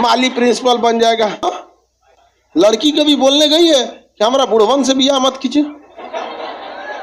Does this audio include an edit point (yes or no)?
yes